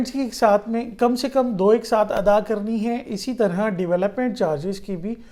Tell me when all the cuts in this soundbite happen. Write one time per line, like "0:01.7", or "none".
none